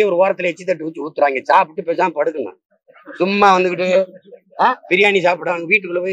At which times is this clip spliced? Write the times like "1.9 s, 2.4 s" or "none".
none